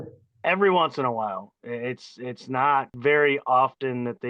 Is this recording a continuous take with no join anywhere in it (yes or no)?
no